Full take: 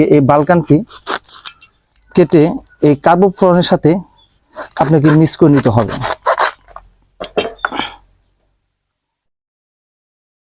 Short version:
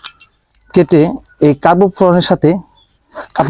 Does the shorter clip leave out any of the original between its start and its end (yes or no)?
no